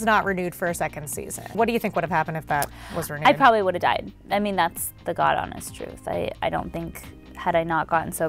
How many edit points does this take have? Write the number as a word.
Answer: two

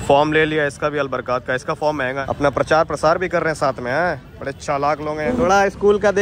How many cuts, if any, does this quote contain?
two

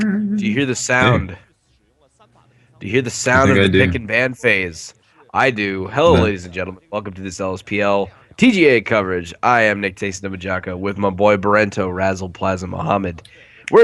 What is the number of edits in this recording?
one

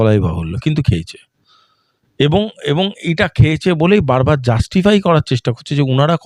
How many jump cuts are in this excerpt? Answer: zero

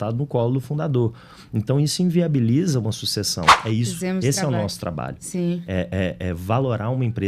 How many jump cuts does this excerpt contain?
one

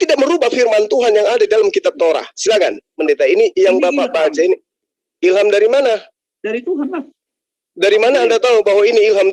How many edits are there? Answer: one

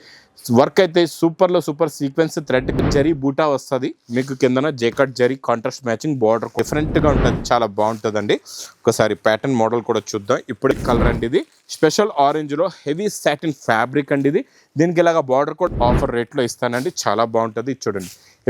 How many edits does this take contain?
four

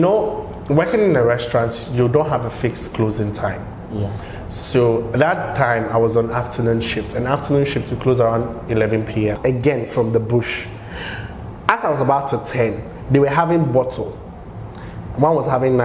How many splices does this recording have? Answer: one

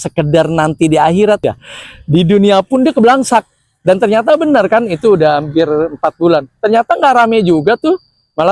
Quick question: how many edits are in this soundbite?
one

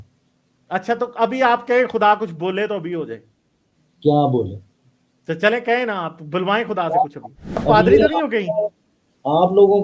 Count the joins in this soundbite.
one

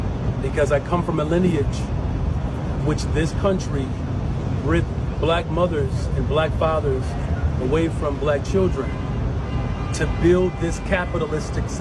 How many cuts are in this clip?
zero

